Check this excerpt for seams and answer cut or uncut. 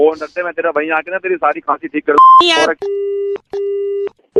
uncut